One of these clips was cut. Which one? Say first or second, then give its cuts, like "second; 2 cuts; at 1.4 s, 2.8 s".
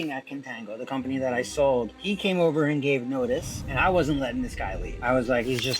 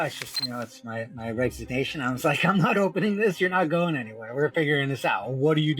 first; 3 cuts; at 2.0 s, 3.6 s, 4.9 s